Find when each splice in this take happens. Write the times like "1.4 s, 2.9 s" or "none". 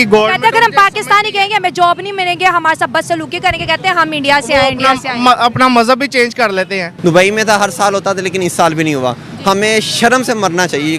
6.8 s